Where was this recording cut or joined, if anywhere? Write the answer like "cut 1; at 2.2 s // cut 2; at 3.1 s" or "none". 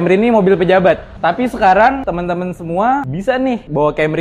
cut 1; at 2.0 s // cut 2; at 3.4 s